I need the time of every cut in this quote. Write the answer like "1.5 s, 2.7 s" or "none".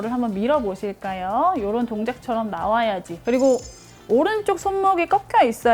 3.1 s